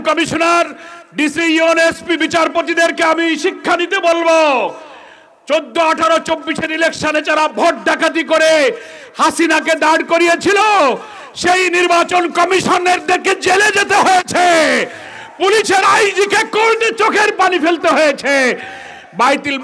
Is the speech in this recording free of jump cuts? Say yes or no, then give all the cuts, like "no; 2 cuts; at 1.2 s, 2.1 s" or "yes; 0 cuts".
yes; 0 cuts